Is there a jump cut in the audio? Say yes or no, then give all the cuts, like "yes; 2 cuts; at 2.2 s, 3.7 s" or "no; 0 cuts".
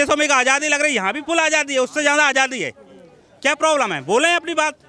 no; 0 cuts